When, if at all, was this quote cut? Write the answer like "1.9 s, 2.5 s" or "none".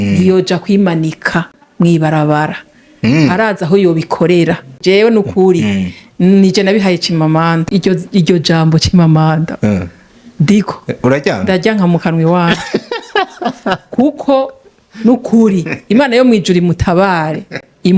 4.7 s, 7.6 s